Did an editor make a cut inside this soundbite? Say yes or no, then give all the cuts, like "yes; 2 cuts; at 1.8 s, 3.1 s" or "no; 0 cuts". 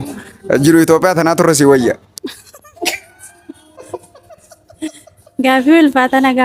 no; 0 cuts